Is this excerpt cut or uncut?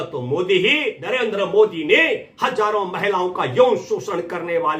cut